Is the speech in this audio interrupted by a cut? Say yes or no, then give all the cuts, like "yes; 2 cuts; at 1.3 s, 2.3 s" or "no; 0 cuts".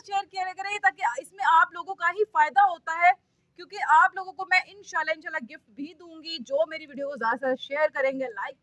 no; 0 cuts